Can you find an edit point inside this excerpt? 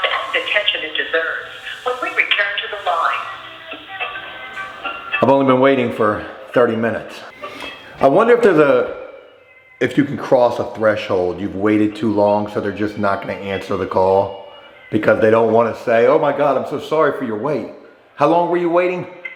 no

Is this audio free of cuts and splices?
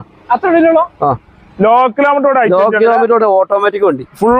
yes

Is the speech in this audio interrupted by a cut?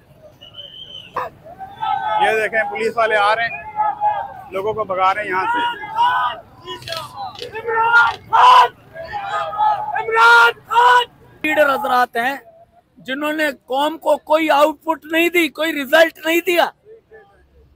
yes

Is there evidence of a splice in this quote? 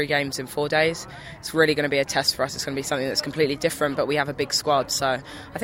no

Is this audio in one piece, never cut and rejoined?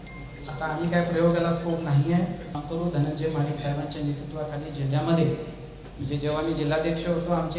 no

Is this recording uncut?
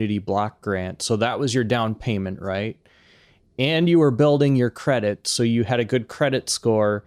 yes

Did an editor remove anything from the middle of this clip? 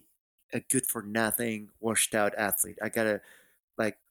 no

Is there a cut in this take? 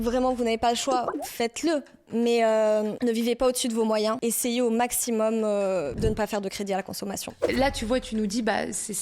yes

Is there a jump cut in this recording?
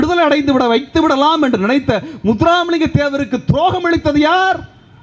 no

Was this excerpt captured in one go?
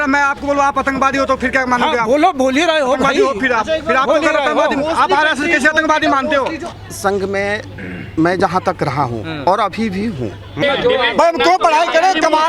no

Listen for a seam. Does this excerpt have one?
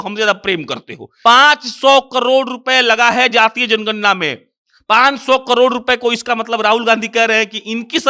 yes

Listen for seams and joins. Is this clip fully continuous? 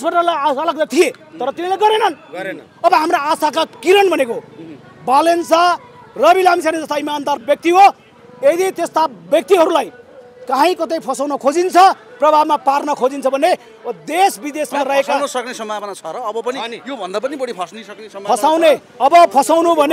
yes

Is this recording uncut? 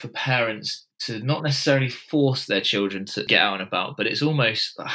no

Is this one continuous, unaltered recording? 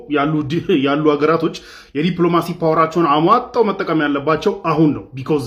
yes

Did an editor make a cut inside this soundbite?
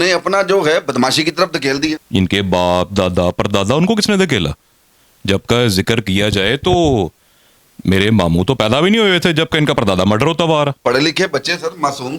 yes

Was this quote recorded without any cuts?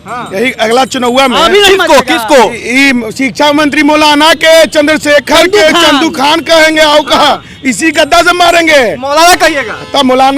yes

